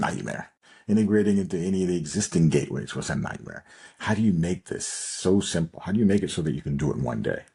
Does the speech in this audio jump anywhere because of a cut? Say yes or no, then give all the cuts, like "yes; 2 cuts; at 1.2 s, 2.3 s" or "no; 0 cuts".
no; 0 cuts